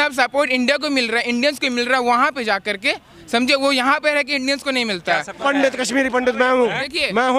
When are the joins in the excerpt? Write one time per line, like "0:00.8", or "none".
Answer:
0:05.4

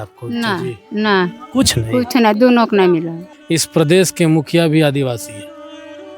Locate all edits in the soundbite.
0:03.3

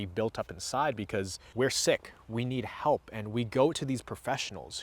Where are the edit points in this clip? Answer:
0:01.4

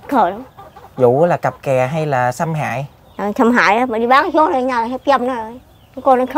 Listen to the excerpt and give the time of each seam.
none

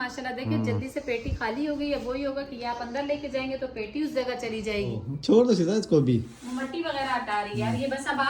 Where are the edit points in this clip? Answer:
0:05.0

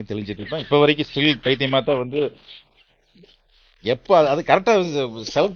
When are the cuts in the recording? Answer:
none

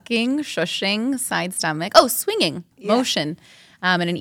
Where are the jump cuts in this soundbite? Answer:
0:02.7

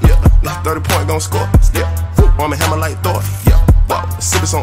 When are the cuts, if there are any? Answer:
none

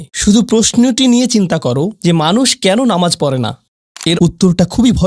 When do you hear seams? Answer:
0:04.2

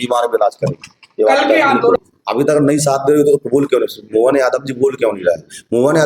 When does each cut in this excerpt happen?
0:02.0

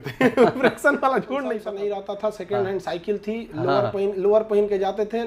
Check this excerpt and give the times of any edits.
0:01.6

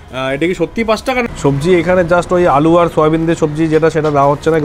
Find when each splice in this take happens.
0:01.2

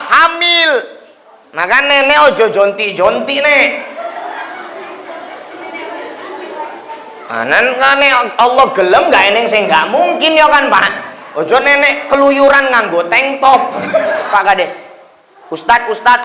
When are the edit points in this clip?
0:14.3

